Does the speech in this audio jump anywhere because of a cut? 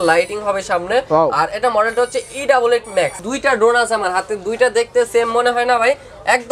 yes; 1 cut; at 3.2 s

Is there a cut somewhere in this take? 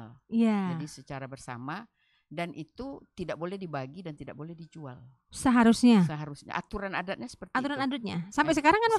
no; 0 cuts

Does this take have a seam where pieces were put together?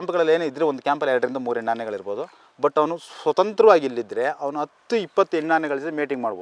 no; 0 cuts

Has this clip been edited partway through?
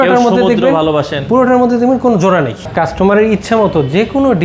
yes; 1 cut; at 2.7 s

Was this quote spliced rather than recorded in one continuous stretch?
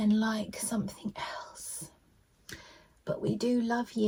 no; 0 cuts

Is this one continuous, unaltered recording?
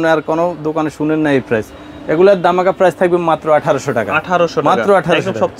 yes; 0 cuts

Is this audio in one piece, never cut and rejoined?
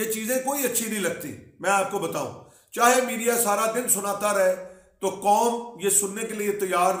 yes; 0 cuts

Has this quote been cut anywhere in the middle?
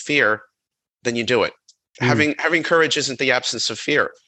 yes; 1 cut; at 1.8 s

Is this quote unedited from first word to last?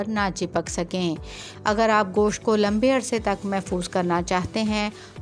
no; 1 cut; at 1.4 s

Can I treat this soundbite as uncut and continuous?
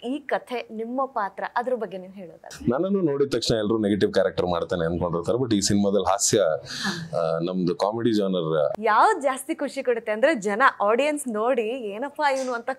no; 2 cuts; at 2.4 s, 8.8 s

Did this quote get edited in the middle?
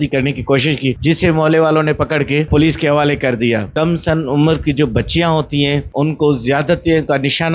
yes; 4 cuts; at 1.0 s, 2.5 s, 3.7 s, 5.9 s

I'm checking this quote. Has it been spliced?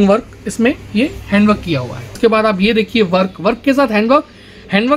yes; 1 cut; at 2.2 s

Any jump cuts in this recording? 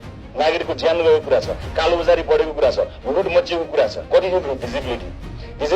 yes; 1 cut; at 4.0 s

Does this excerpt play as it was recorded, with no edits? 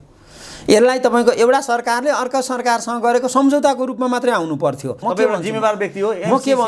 no; 1 cut; at 4.9 s

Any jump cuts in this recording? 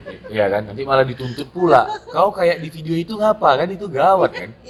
no; 0 cuts

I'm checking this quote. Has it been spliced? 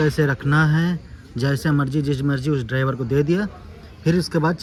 no; 0 cuts

